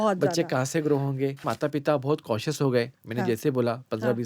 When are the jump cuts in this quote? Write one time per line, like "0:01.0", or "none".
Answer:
0:01.4